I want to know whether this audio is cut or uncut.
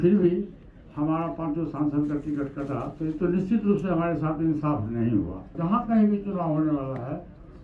cut